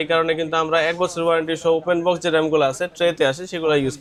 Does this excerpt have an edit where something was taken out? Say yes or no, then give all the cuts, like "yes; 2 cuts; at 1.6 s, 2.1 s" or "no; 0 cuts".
no; 0 cuts